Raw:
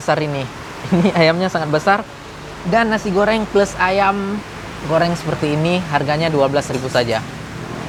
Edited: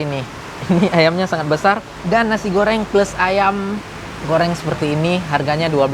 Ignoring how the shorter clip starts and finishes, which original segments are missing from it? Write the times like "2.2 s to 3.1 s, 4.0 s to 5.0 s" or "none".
2.1 s to 2.5 s